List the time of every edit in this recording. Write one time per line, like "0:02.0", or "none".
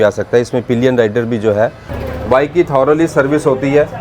0:01.9